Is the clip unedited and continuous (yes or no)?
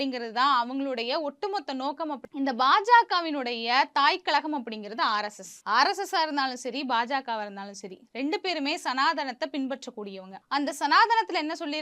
no